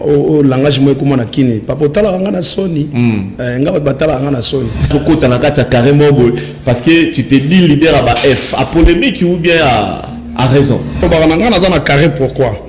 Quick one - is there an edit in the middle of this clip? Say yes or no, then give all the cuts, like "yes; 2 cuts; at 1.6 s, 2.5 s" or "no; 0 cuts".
yes; 2 cuts; at 4.9 s, 11.0 s